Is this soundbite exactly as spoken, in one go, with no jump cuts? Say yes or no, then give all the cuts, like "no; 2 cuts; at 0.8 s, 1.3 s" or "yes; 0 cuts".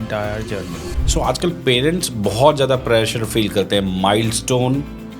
no; 1 cut; at 0.9 s